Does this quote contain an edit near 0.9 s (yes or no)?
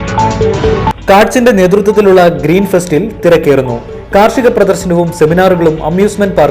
yes